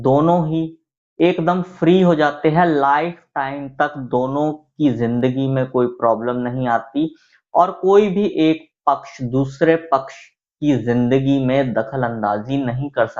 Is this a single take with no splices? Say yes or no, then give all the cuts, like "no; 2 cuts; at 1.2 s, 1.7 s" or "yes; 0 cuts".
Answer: yes; 0 cuts